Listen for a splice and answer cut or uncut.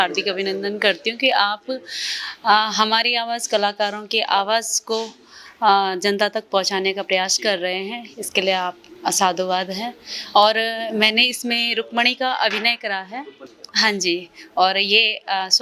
uncut